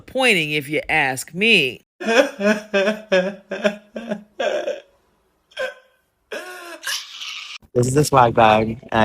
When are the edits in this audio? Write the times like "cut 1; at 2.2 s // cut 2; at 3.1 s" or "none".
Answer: cut 1; at 7.6 s